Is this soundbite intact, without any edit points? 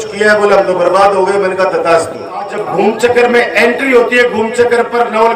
no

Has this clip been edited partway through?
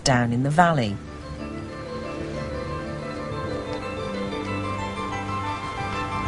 no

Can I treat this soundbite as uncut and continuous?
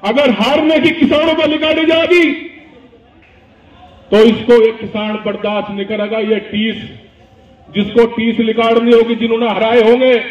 yes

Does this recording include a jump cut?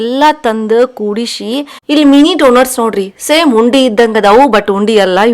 yes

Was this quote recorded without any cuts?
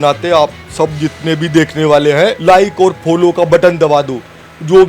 no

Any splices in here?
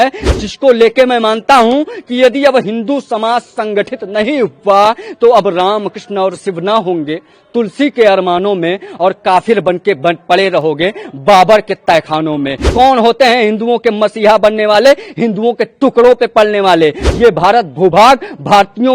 yes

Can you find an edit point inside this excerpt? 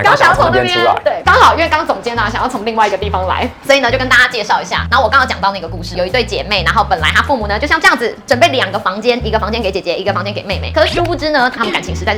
no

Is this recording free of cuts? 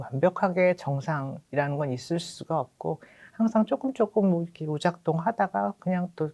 yes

